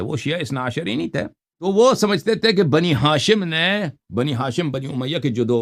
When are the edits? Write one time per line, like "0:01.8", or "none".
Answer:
0:01.4